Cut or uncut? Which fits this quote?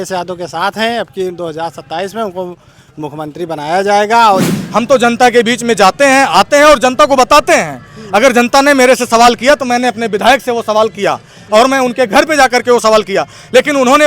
cut